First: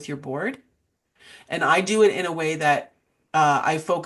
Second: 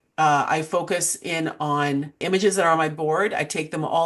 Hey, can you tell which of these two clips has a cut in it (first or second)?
second